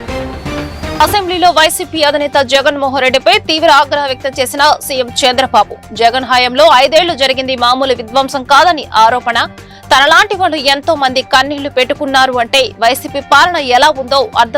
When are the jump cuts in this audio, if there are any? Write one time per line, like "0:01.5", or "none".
0:01.0